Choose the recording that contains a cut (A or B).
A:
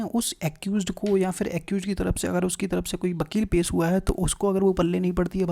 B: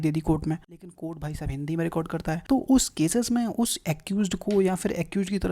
B